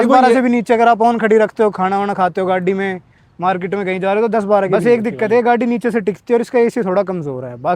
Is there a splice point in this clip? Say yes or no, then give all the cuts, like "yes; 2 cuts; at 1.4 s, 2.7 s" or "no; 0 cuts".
yes; 1 cut; at 4.7 s